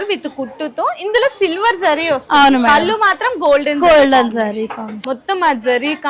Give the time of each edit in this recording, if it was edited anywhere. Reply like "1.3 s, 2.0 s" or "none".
4.9 s